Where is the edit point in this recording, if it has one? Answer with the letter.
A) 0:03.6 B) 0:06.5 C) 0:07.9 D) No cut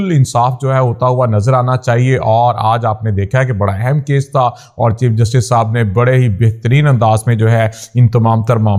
D